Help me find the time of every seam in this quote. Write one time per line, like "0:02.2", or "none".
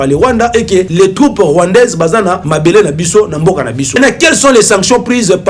0:00.9
0:02.5
0:04.0